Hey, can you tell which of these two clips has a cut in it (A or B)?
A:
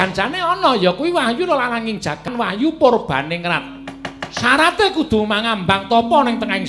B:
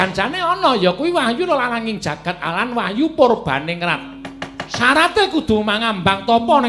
A